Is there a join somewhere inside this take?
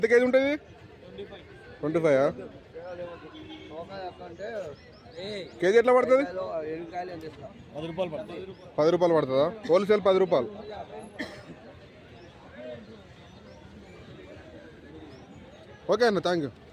no; 0 cuts

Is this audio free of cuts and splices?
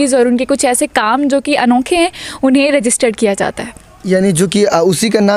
yes; 0 cuts

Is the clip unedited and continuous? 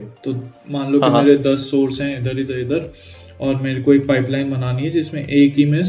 yes; 0 cuts

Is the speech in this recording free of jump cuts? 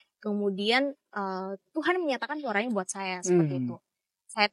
yes; 0 cuts

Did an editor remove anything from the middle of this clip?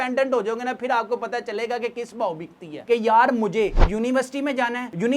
yes; 1 cut; at 2.8 s

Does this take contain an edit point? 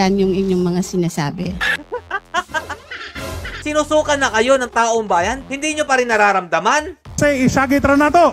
yes; 1 cut; at 3.6 s

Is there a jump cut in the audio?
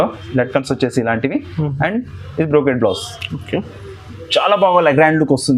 no; 0 cuts

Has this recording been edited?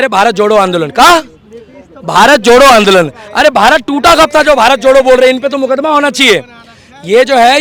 no; 0 cuts

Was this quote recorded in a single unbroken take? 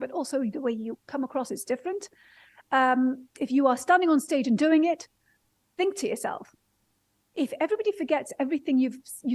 yes; 0 cuts

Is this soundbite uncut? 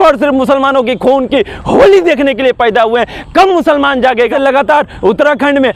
no; 1 cut; at 4.3 s

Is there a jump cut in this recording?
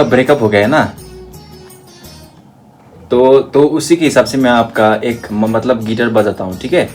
no; 0 cuts

